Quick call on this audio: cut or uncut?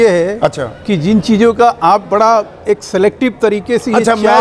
uncut